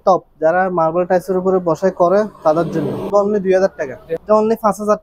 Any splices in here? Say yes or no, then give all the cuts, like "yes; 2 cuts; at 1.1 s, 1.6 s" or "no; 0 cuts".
yes; 2 cuts; at 3.1 s, 4.0 s